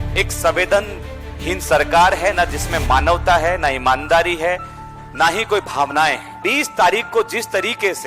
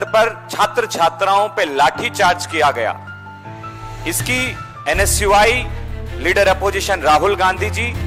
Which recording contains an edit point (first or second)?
first